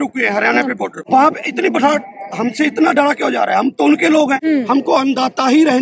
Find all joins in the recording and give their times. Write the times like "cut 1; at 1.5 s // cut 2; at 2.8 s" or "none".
cut 1; at 1.0 s // cut 2; at 4.4 s